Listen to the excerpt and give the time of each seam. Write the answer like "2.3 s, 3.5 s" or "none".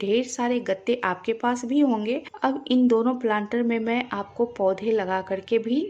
2.3 s